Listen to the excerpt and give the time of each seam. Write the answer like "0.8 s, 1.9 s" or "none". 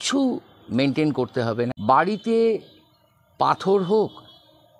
1.7 s